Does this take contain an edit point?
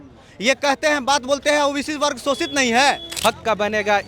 yes; 1 cut; at 3.1 s

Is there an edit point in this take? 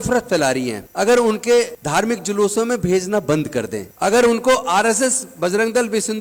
no; 0 cuts

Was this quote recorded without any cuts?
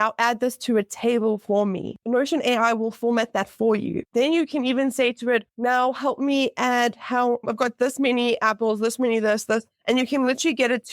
no; 3 cuts; at 2.0 s, 4.0 s, 5.5 s

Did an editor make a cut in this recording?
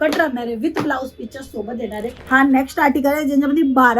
yes; 1 cut; at 2.1 s

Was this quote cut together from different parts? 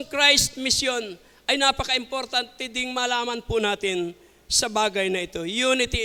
no; 0 cuts

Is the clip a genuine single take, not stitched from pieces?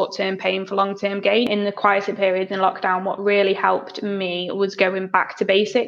no; 1 cut; at 1.5 s

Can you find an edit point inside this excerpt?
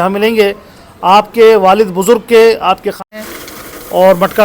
yes; 1 cut; at 3.1 s

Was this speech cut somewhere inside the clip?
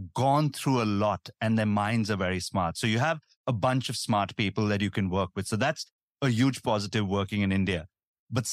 no; 0 cuts

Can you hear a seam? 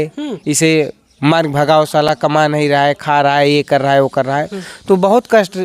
no; 0 cuts

